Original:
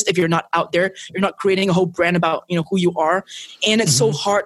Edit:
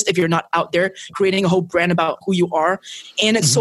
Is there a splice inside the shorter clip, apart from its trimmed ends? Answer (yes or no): yes